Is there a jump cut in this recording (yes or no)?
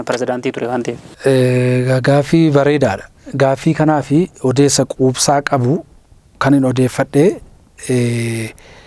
no